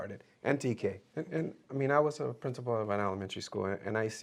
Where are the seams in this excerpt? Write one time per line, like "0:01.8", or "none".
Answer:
0:01.1